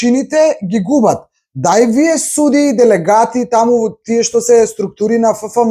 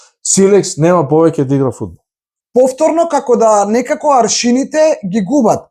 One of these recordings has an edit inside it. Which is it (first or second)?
second